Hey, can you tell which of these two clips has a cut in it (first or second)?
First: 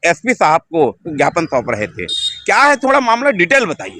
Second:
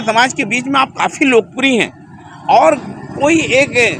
first